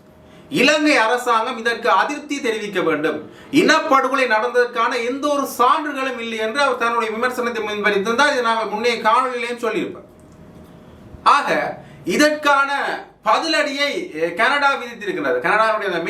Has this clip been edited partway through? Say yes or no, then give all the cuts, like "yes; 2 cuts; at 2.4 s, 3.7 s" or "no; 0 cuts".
no; 0 cuts